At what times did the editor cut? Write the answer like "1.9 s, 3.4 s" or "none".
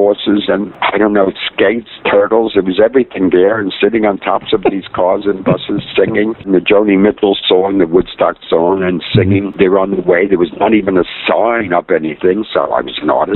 none

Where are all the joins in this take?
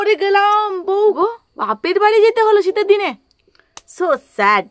1.2 s

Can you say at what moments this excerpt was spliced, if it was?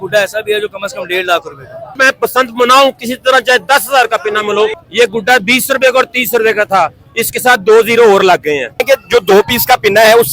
2.0 s, 4.8 s, 8.8 s

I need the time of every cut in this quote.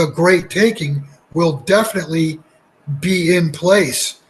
none

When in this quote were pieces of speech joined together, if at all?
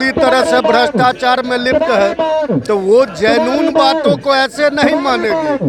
none

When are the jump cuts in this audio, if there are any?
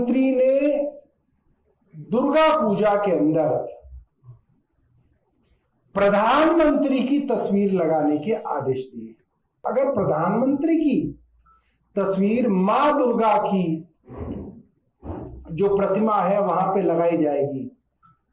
9.6 s

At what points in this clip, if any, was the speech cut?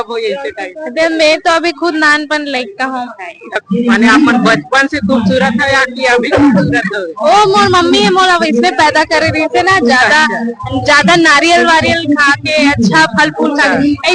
3.6 s

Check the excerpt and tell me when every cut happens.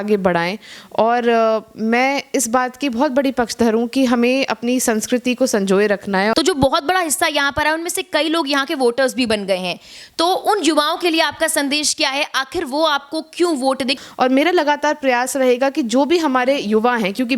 6.3 s, 13.9 s

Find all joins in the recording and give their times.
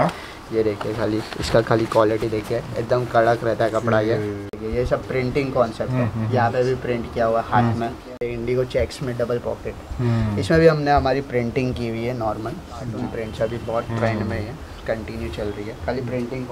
4.6 s, 8.3 s, 12.9 s

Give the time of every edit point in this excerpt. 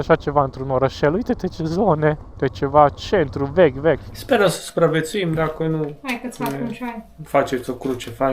2.3 s, 4.1 s

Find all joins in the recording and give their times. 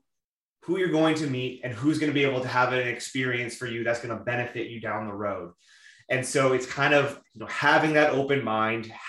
none

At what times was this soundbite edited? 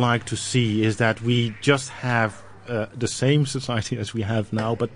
none

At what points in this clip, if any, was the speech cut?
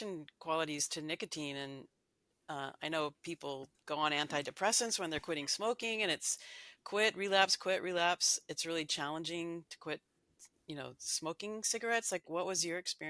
none

